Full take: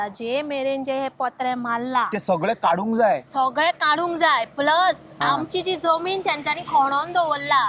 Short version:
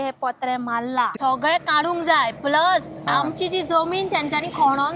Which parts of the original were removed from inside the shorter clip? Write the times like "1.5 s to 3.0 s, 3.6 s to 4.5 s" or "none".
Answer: 2.1 s to 3.3 s

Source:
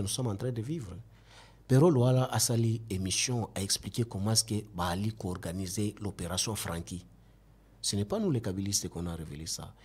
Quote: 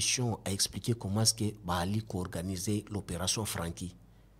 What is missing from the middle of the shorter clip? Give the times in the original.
none

